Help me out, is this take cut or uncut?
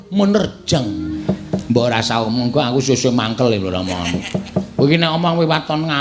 cut